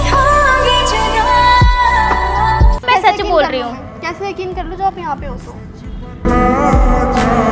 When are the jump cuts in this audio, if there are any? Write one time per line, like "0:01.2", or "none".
0:02.8